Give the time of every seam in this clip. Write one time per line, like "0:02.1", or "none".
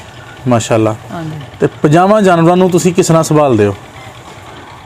none